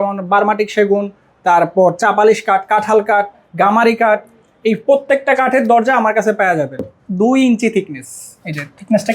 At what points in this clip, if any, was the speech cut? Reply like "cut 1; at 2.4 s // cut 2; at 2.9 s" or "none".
cut 1; at 6.9 s